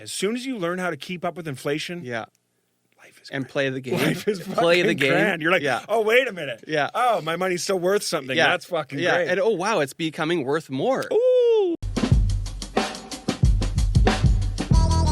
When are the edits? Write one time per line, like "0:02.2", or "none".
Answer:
0:11.8